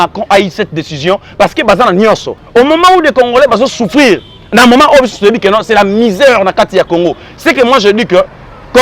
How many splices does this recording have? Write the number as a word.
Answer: one